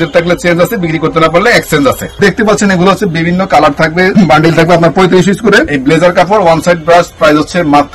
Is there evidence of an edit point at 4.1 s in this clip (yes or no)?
yes